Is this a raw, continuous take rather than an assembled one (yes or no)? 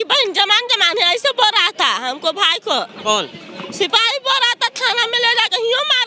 yes